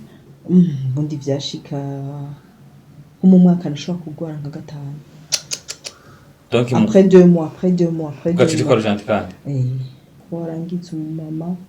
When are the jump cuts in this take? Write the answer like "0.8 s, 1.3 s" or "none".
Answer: 10.2 s